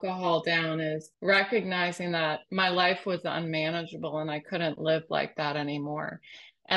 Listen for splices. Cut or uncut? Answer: cut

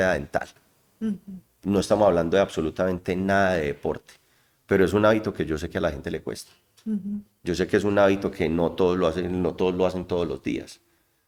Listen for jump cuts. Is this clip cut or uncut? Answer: uncut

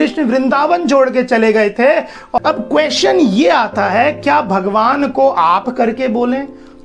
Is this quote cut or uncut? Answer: cut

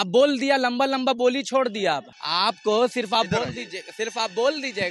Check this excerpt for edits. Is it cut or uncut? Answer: uncut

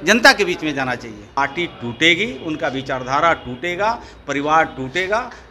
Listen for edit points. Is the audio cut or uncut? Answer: cut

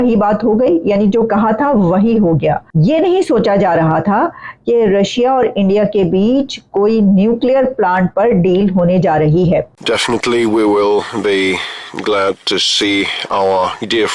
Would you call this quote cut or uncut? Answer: cut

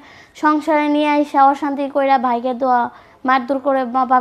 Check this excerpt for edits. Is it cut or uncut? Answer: uncut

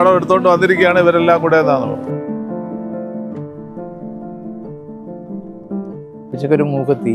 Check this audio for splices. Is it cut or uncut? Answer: uncut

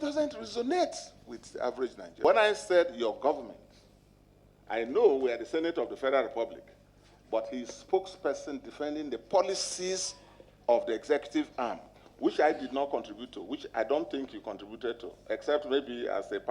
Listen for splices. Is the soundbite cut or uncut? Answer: cut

